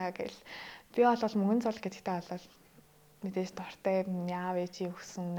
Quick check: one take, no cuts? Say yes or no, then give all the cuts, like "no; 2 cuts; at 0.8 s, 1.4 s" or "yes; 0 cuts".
yes; 0 cuts